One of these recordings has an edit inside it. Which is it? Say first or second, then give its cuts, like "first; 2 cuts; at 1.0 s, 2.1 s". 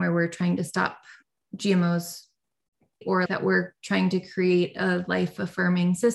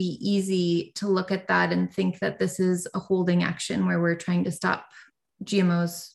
first; 1 cut; at 3.2 s